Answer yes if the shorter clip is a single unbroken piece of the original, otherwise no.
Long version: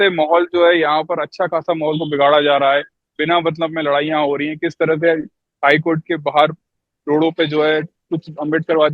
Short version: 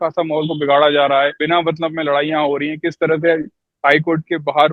no